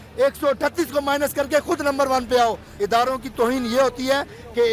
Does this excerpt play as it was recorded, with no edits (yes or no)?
no